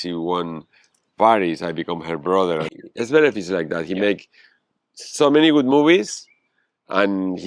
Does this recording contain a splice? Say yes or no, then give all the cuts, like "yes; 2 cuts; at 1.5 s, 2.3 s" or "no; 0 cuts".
yes; 1 cut; at 2.7 s